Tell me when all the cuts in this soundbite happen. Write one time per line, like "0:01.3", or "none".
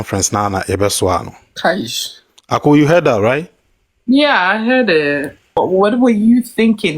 0:05.6